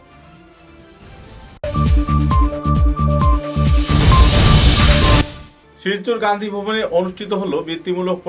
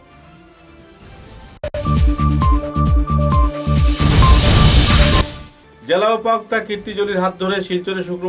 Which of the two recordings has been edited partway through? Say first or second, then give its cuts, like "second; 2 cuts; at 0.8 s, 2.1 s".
second; 2 cuts; at 1.7 s, 5.2 s